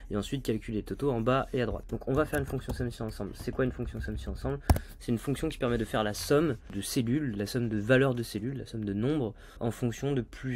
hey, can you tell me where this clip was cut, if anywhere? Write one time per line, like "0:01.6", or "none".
0:01.9
0:06.7
0:09.5

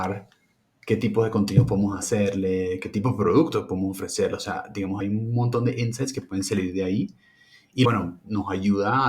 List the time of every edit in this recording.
0:05.0
0:07.8

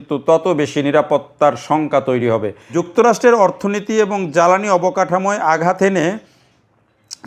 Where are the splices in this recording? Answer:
0:02.6

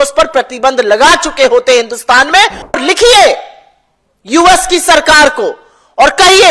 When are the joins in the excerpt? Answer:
0:02.8

